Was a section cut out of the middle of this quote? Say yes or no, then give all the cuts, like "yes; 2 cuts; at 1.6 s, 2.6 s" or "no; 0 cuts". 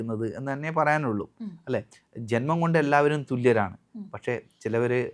no; 0 cuts